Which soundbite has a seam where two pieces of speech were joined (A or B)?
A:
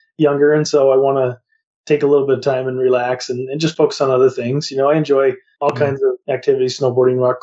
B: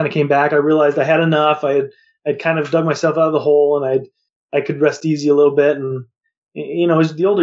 A